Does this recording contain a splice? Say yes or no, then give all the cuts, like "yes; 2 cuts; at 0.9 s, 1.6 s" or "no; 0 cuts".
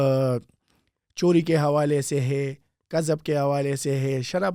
no; 0 cuts